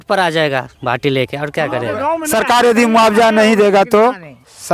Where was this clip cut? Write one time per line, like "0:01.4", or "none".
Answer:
0:02.0